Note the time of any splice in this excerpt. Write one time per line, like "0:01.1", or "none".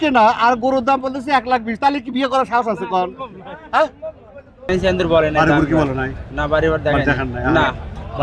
0:04.7